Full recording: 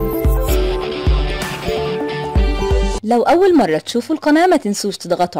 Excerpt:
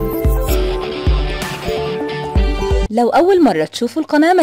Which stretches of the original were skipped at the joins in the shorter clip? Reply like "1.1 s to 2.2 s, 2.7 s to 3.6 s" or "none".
2.9 s to 3.0 s

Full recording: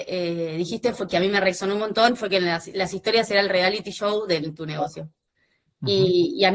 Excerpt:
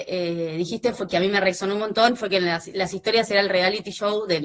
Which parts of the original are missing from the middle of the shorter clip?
none

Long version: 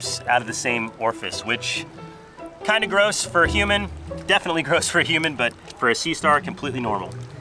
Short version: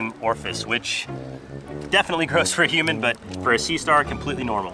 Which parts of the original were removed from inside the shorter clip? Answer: 2.4 s to 4.0 s

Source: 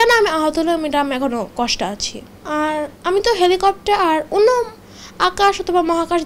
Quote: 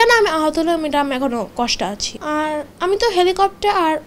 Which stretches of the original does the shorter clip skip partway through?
2.1 s to 2.3 s

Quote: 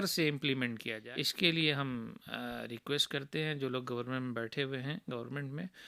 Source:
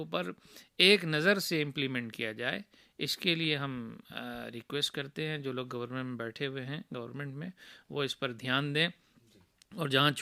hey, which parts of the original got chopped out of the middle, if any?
2.3 s to 2.8 s

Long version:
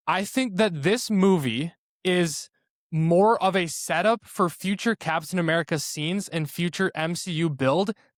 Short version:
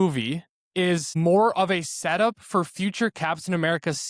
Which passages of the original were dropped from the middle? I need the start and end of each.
2.4 s to 2.9 s

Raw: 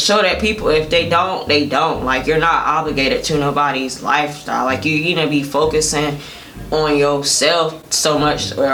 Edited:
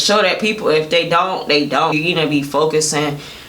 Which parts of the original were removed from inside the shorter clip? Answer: 1.9 s to 4.9 s

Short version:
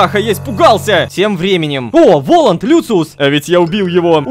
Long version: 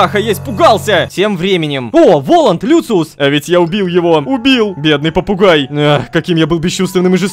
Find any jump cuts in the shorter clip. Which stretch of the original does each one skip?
none

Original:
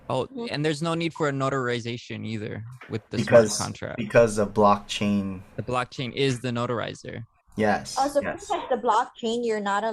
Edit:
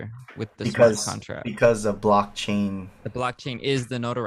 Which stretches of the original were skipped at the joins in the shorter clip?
none

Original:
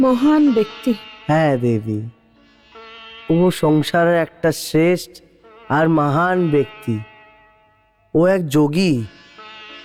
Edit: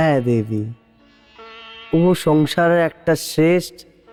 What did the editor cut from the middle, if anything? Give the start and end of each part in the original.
none

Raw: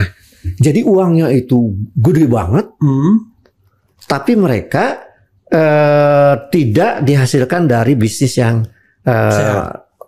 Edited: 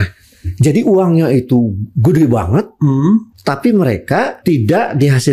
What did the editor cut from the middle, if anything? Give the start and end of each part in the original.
3.3 s to 4.0 s, 5.0 s to 6.4 s

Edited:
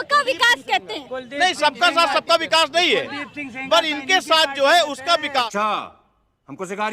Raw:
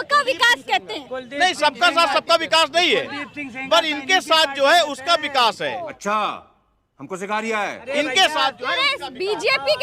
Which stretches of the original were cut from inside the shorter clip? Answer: 5.4 s to 5.9 s

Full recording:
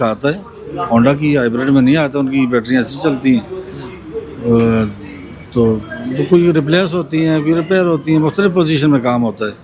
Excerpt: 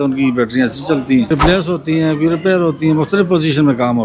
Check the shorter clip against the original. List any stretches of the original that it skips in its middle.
3.4 s to 6.5 s

